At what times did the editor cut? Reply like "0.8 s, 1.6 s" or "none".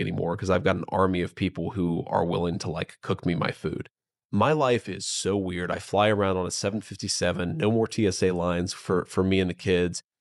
none